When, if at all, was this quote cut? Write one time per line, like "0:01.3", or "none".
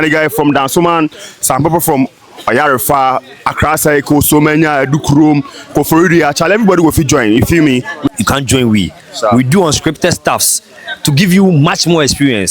0:08.1